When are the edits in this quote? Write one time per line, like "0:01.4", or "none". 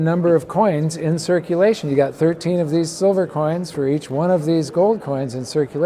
none